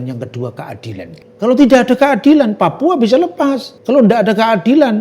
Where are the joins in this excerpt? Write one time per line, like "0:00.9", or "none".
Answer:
0:01.2
0:03.7